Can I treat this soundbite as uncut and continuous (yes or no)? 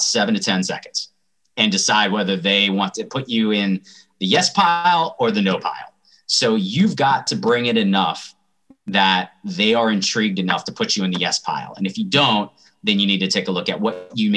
no